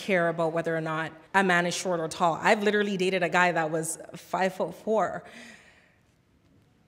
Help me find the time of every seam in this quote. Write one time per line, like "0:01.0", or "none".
0:01.1